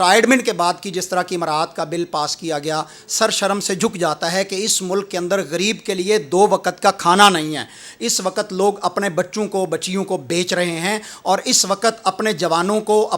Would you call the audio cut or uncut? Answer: uncut